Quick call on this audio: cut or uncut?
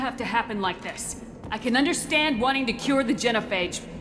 uncut